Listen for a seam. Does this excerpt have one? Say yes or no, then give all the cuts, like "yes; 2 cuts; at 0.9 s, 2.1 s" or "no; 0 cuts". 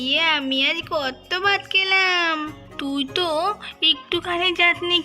yes; 1 cut; at 2.6 s